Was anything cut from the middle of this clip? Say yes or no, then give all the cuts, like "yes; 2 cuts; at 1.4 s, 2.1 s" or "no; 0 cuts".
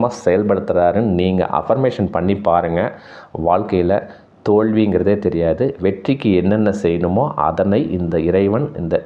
no; 0 cuts